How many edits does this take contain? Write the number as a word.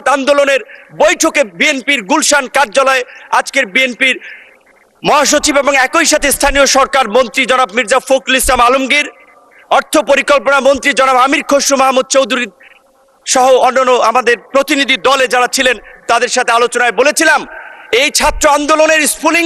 zero